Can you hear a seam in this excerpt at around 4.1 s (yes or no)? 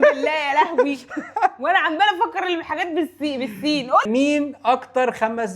yes